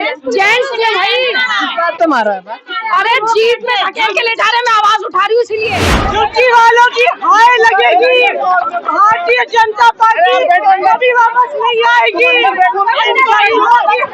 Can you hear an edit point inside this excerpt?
yes; 1 cut; at 6.0 s

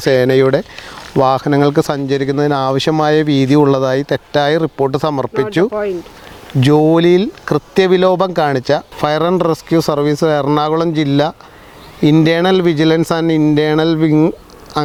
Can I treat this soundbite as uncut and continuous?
yes; 0 cuts

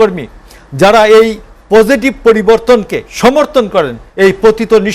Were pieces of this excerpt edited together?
yes; 2 cuts; at 3.0 s, 4.0 s

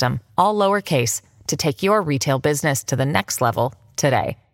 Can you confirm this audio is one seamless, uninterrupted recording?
yes; 0 cuts

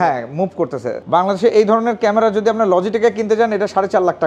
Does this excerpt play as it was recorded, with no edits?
no; 1 cut; at 1.0 s

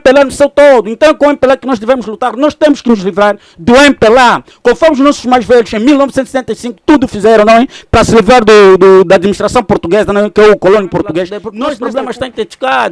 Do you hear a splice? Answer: yes; 1 cut; at 11.4 s

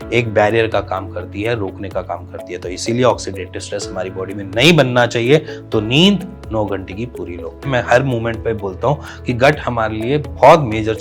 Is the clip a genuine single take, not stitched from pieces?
no; 1 cut; at 7.7 s

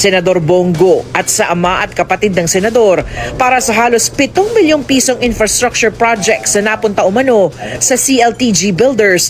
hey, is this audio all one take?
yes; 0 cuts

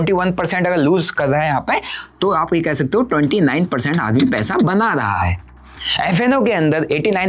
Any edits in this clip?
no; 0 cuts

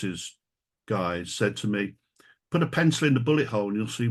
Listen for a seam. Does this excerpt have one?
no; 0 cuts

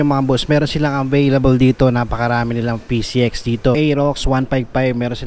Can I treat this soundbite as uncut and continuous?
no; 1 cut; at 3.8 s

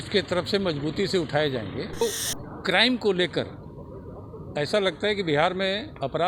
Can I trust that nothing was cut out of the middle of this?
no; 1 cut; at 2.0 s

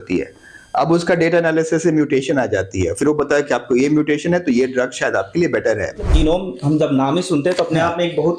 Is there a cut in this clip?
yes; 1 cut; at 6.1 s

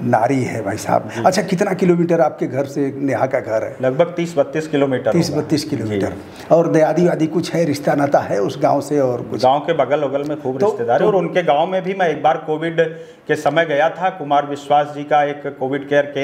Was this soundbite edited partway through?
no; 0 cuts

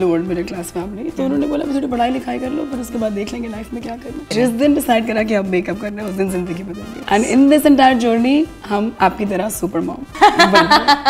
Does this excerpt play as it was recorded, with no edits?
no; 3 cuts; at 4.3 s, 6.9 s, 10.2 s

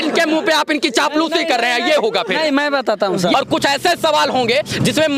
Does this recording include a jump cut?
yes; 1 cut; at 3.3 s

